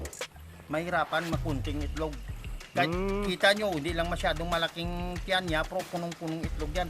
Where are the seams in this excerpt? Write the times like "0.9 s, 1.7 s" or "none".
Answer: none